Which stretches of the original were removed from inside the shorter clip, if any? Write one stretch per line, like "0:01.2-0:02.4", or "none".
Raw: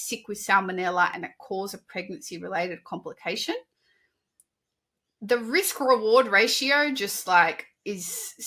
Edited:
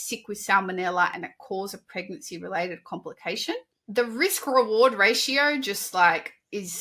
0:03.8-0:05.1